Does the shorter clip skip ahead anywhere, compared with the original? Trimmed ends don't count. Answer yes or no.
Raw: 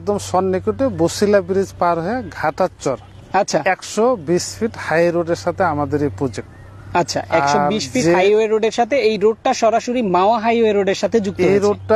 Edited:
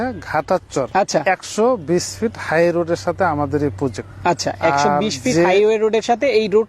yes